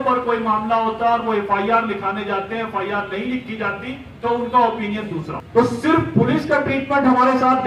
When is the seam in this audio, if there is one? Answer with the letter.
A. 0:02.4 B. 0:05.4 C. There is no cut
B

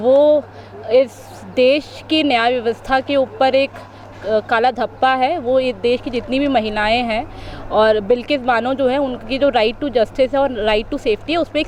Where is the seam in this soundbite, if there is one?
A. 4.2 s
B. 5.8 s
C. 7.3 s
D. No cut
D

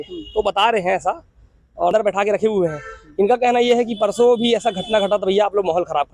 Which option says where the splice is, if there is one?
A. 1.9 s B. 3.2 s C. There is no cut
A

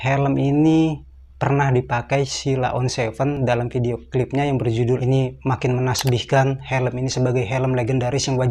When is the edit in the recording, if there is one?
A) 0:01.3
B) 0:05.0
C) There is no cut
B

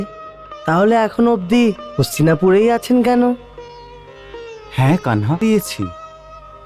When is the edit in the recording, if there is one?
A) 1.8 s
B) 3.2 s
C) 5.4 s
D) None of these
C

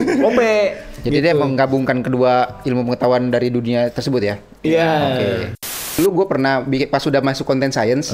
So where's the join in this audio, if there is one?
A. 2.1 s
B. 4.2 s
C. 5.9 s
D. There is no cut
C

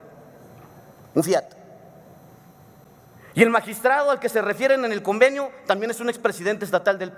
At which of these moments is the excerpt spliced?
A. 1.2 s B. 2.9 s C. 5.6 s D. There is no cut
B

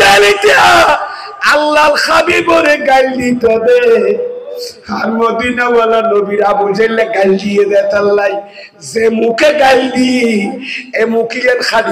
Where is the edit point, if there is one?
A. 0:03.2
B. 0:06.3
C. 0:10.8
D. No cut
D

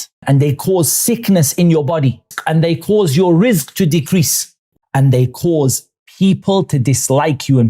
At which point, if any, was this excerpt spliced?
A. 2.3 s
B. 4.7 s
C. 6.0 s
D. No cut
B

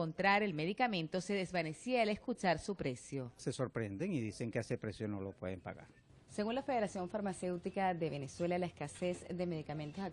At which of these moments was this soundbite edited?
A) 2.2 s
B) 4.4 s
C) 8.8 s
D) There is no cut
A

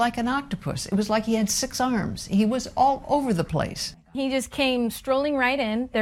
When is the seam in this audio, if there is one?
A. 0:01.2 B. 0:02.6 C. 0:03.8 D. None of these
C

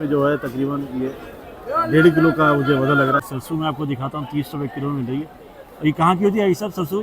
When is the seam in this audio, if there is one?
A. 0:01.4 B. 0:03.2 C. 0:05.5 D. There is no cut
B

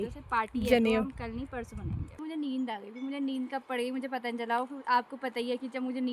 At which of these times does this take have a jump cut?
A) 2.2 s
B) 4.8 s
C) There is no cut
A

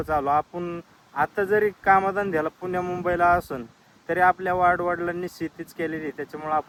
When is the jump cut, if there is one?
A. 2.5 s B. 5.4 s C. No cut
C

